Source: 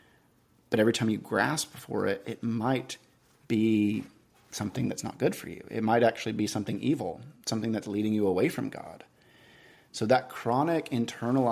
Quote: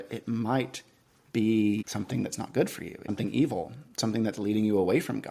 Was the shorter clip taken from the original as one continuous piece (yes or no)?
no